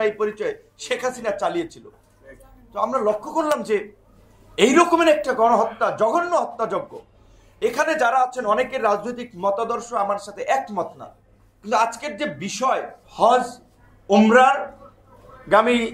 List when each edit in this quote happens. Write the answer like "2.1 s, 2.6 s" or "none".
none